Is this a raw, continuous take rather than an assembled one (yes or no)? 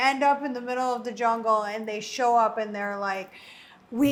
yes